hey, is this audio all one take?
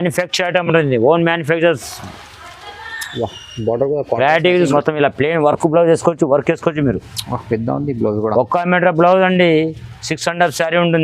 no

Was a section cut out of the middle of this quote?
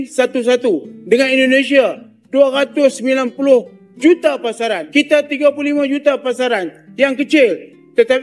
yes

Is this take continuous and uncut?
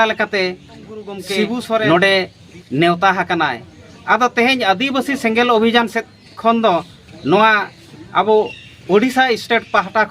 no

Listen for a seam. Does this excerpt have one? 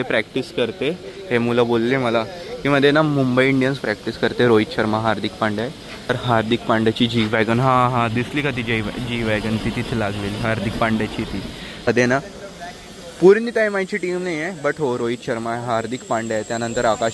yes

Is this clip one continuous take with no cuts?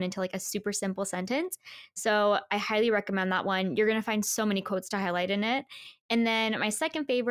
yes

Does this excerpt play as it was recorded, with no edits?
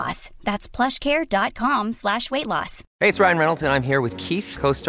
no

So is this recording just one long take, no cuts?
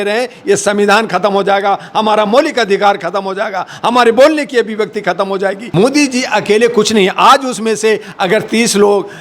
no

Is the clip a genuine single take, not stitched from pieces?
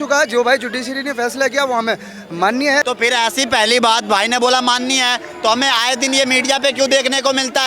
no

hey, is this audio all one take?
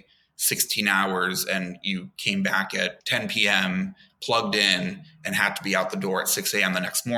no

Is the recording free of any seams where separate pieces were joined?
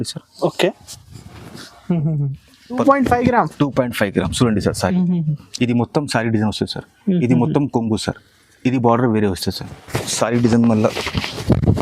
no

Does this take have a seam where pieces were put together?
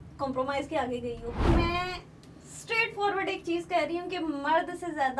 yes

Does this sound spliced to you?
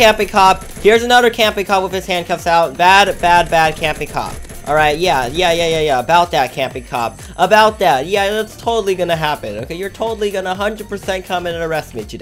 no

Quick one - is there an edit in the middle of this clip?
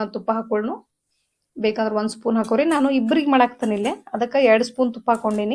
no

